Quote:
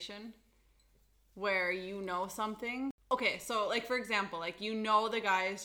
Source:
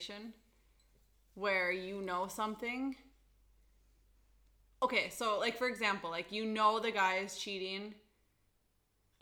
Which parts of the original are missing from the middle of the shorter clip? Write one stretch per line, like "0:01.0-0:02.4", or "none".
0:03.0-0:04.7